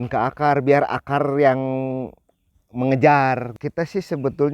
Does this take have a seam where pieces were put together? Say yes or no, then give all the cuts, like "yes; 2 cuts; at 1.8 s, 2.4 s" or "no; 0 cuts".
yes; 1 cut; at 3.5 s